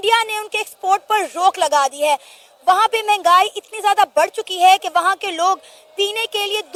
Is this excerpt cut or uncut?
uncut